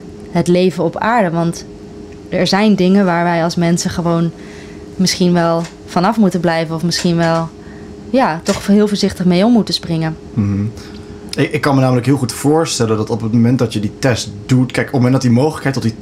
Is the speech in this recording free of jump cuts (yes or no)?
yes